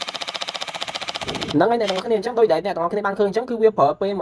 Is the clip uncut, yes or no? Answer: yes